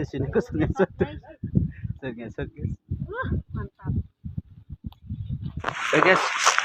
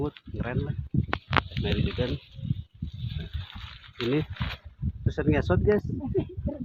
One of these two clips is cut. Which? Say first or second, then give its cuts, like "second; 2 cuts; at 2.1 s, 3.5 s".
first; 1 cut; at 5.7 s